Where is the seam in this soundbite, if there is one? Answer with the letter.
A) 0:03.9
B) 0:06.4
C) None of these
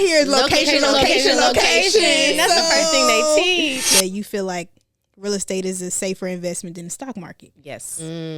A